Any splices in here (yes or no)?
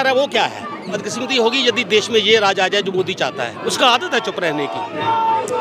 yes